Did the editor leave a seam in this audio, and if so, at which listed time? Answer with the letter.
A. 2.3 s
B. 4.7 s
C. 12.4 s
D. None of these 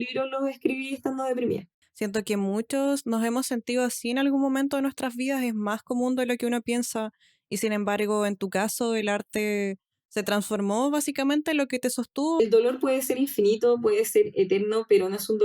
C